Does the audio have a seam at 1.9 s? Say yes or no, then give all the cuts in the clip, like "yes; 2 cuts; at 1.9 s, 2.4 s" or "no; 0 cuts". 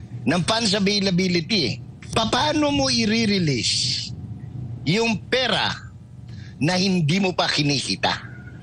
yes; 1 cut; at 1.9 s